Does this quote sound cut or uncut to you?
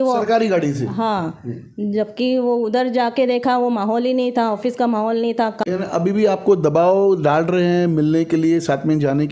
cut